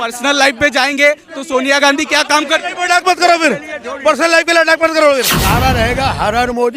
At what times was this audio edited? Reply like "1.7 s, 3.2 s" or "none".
5.4 s